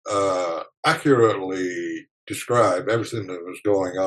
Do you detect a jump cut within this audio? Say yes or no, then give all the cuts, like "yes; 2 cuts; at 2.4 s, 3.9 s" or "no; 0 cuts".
no; 0 cuts